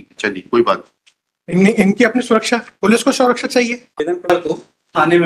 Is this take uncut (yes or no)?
no